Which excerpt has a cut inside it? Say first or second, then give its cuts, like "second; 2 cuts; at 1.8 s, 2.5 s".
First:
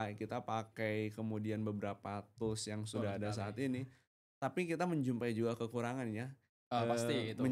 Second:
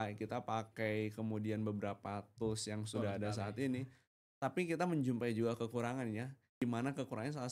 second; 1 cut; at 6.6 s